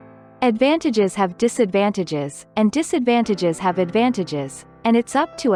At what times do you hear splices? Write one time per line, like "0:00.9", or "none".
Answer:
none